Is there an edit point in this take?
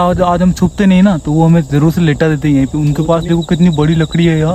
no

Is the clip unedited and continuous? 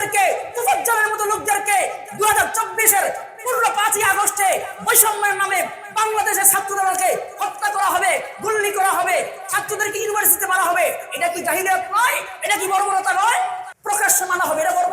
no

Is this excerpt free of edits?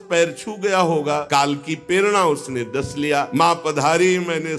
no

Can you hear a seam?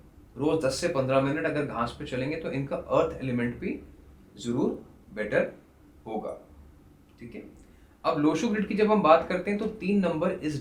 no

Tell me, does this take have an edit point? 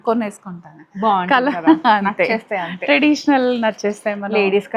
no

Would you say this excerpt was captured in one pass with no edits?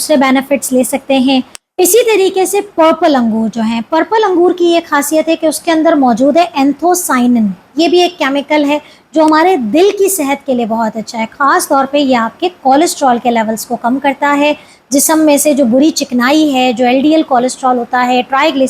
no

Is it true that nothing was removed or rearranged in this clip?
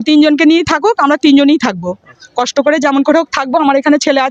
yes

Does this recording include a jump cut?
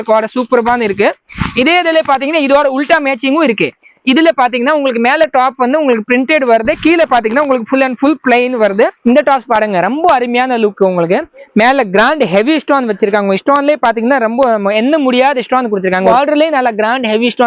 yes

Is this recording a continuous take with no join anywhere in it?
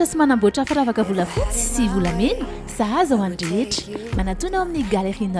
yes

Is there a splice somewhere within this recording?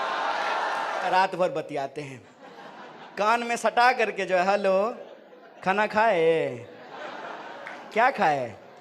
yes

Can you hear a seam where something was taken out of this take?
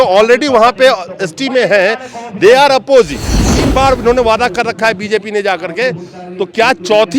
yes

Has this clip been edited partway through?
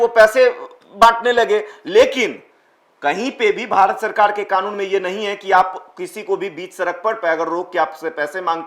no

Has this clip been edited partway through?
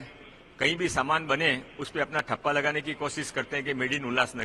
no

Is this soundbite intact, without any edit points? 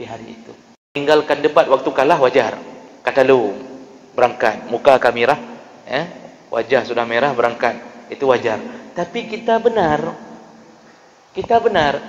no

